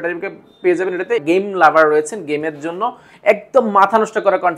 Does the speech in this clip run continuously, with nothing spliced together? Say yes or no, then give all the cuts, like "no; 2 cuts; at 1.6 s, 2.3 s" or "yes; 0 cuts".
no; 1 cut; at 1.2 s